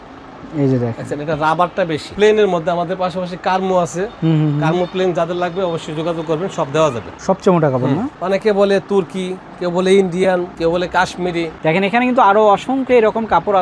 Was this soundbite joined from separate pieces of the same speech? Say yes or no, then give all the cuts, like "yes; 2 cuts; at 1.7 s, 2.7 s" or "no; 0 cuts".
yes; 5 cuts; at 2.1 s, 7.1 s, 8.1 s, 10.5 s, 11.5 s